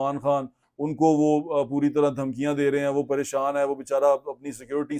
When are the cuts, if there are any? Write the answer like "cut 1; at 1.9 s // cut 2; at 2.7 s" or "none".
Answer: none